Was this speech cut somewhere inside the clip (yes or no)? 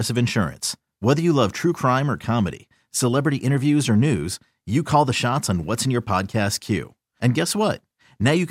no